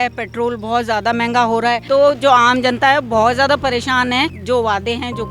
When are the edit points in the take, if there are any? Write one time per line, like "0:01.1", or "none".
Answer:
0:01.8
0:04.4

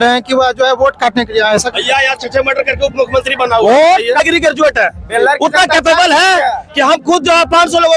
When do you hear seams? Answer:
0:04.2

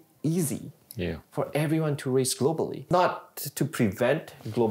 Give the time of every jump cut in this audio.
0:02.8

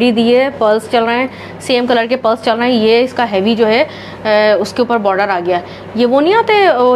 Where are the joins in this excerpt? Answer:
none

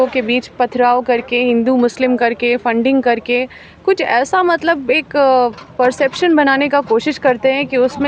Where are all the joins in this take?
none

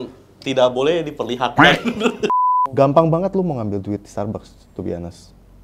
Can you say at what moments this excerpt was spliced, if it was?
0:02.4

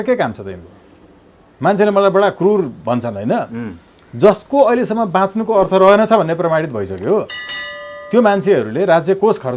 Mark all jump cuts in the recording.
none

